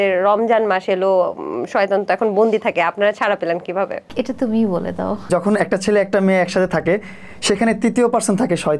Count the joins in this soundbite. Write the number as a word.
two